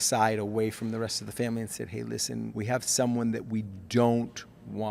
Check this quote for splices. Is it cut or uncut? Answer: cut